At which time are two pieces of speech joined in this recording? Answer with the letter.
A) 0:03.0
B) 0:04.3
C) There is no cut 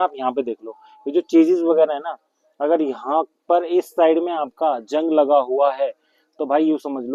C